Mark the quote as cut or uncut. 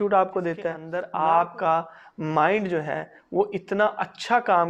cut